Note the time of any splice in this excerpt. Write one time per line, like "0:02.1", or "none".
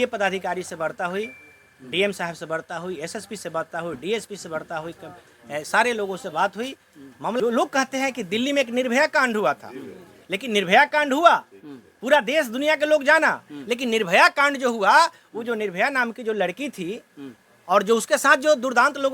0:07.4